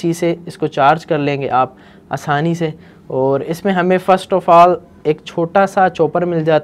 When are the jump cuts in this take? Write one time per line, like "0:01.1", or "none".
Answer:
none